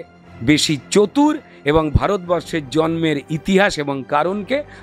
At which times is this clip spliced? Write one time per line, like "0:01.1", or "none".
none